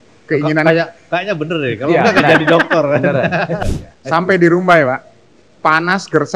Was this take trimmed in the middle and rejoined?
yes; 1 cut; at 3.6 s

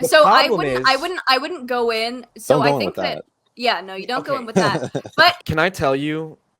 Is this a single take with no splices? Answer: no; 2 cuts; at 2.3 s, 5.4 s

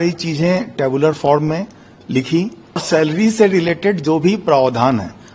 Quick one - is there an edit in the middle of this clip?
yes; 1 cut; at 2.8 s

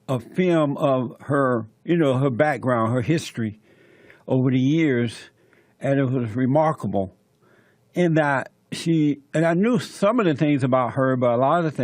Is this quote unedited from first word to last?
no; 1 cut; at 4.5 s

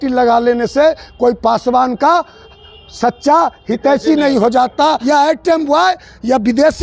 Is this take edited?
yes; 1 cut; at 5.0 s

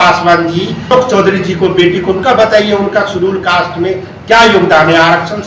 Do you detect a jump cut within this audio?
yes; 1 cut; at 0.9 s

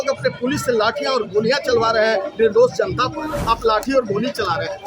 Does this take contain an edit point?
yes; 1 cut; at 3.4 s

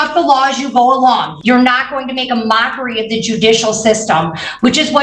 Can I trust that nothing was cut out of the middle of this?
no; 1 cut; at 1.3 s

